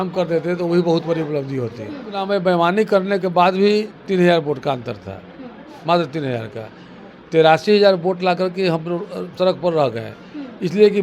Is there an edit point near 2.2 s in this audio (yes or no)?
yes